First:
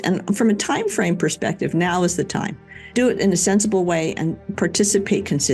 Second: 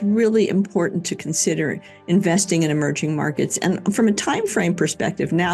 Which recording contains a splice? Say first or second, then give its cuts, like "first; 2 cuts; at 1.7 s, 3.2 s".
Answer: first; 2 cuts; at 2.9 s, 4.4 s